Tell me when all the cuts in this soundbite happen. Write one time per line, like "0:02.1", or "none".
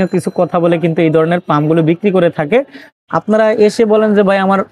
0:02.9

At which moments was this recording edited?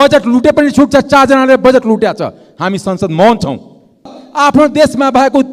0:04.2

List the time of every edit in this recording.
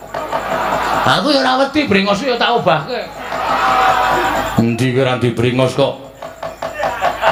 none

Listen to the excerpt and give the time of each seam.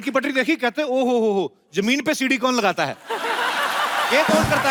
none

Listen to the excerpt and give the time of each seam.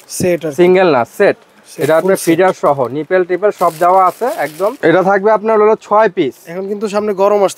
0:04.8

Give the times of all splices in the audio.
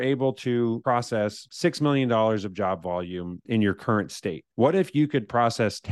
0:01.0
0:03.4
0:04.4

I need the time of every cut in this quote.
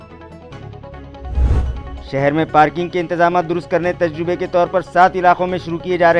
none

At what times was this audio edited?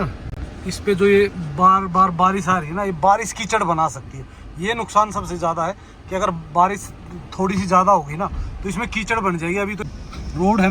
0:09.8

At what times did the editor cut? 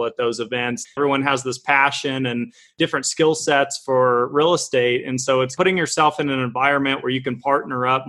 0:01.0
0:05.5

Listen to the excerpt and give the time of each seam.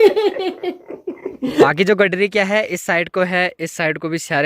0:01.7

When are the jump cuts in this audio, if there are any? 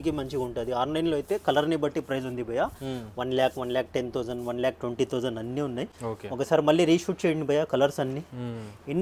none

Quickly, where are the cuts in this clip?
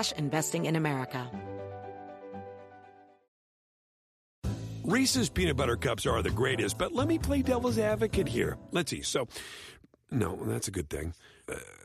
0:01.3

